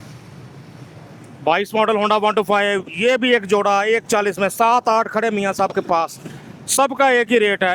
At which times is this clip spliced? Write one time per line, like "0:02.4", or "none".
none